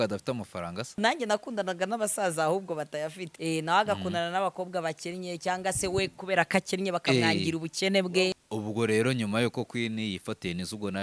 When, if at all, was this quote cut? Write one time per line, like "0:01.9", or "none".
0:01.0
0:03.3
0:08.3

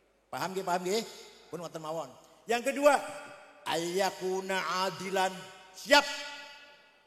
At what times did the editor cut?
none

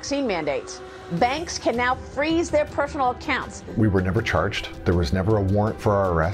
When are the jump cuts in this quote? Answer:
0:03.6
0:04.7

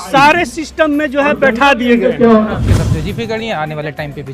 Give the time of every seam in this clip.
0:02.6

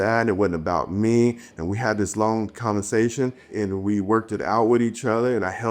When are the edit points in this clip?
0:03.4

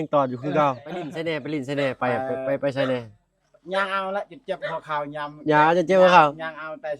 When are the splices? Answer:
0:01.1

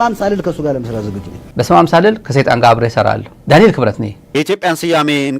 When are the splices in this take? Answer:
0:01.4
0:03.3
0:04.2

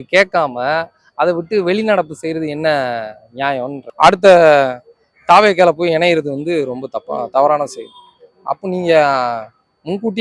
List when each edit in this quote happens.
0:03.8

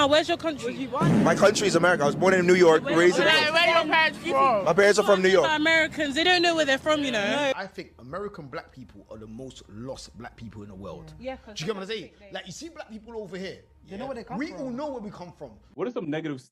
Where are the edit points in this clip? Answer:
0:11.6

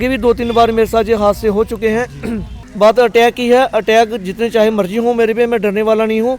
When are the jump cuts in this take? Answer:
0:02.6

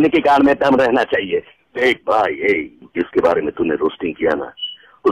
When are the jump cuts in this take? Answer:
0:01.7

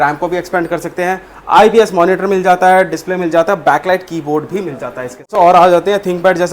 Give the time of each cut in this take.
0:05.3

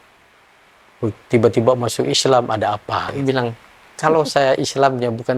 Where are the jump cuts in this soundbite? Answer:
0:03.1

